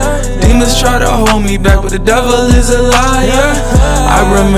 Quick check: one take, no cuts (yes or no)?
yes